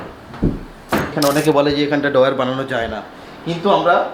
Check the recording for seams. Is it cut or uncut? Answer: cut